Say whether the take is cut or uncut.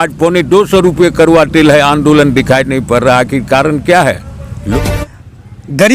cut